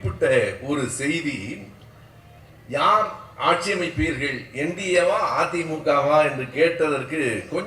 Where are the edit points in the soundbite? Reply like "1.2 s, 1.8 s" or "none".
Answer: none